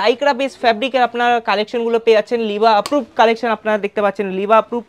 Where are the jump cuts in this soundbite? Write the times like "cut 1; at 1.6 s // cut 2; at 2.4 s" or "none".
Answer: none